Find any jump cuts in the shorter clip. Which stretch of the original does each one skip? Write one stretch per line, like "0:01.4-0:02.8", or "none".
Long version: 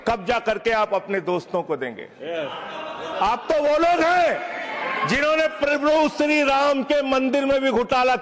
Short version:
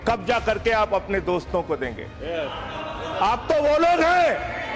none